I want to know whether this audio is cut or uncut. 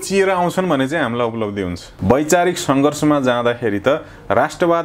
cut